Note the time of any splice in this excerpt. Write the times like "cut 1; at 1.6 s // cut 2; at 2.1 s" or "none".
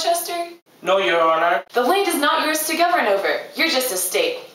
cut 1; at 1.7 s

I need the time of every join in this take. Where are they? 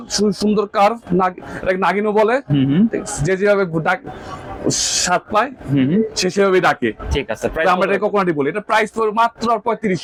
none

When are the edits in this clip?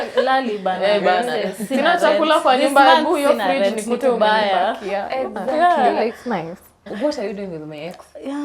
cut 1; at 6.9 s

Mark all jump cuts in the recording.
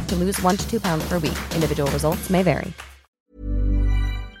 cut 1; at 3.2 s

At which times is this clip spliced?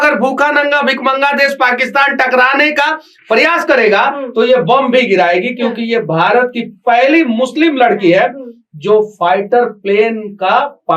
none

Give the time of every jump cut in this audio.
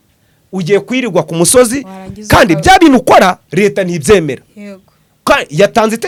none

